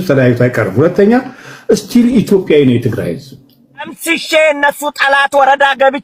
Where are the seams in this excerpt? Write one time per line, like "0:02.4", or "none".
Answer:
0:04.0